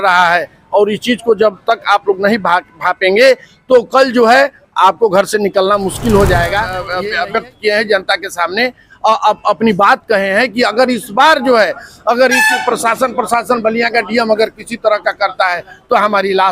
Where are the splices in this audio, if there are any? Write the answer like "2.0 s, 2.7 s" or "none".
6.9 s

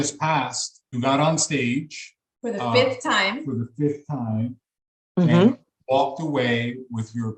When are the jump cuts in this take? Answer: 1.0 s

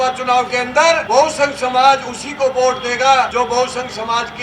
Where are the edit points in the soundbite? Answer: 1.0 s, 3.3 s

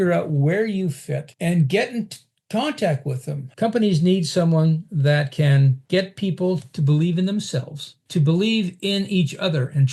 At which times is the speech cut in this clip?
1.3 s, 3.4 s, 7.9 s

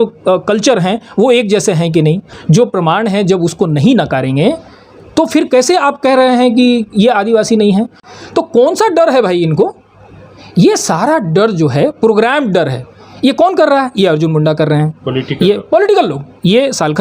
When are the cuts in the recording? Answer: 2.3 s, 8.0 s

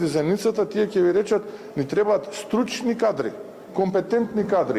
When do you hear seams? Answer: none

